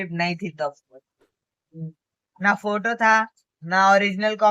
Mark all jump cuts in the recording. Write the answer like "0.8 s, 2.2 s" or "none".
none